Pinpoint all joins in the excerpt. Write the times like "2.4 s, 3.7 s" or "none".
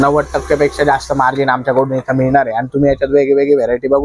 none